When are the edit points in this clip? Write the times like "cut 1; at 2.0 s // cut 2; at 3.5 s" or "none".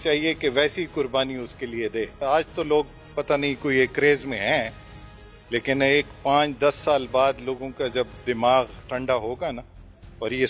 cut 1; at 2.1 s